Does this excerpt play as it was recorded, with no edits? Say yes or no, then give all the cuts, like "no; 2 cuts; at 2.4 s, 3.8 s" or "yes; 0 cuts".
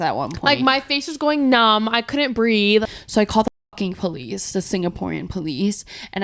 no; 1 cut; at 2.8 s